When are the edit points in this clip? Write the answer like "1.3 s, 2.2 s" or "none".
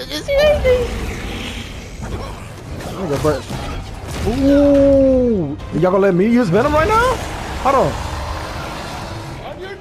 5.6 s